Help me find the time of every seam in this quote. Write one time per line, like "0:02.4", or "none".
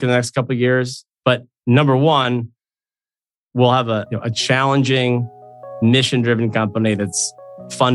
none